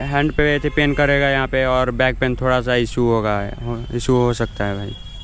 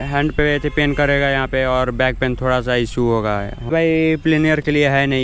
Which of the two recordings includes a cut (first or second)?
second